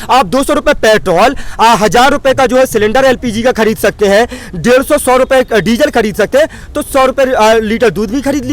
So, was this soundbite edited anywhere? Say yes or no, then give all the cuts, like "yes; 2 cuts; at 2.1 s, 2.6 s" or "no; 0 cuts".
no; 0 cuts